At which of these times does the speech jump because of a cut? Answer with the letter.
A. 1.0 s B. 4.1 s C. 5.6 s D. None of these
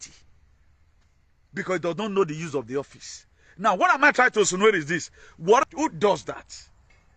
C